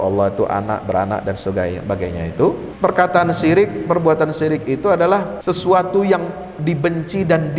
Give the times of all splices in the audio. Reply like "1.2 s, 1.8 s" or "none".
2.7 s, 5.3 s